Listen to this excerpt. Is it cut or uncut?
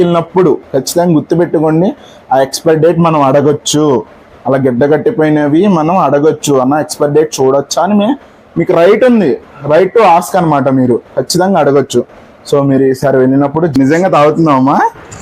cut